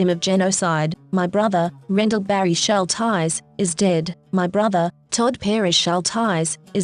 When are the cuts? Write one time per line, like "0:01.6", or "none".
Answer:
0:01.0